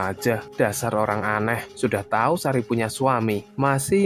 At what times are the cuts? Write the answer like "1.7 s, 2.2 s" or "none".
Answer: none